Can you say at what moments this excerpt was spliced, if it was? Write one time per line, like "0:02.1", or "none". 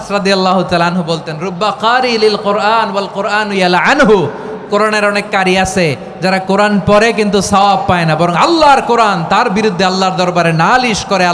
none